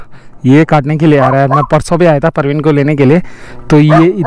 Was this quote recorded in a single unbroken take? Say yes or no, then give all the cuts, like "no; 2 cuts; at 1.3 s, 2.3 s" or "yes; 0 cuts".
yes; 0 cuts